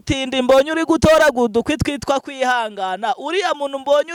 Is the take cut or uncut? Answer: uncut